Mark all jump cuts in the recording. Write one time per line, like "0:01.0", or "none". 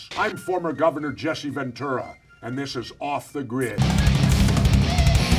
0:01.6